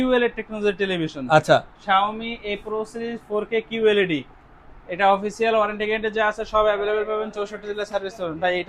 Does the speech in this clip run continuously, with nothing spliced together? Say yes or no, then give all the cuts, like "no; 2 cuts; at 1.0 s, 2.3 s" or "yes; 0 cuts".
yes; 0 cuts